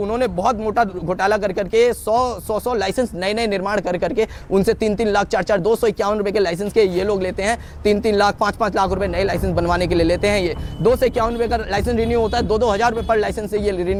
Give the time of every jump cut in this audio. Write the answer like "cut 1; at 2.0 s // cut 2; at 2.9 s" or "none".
none